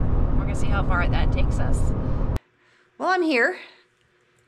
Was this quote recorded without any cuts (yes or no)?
no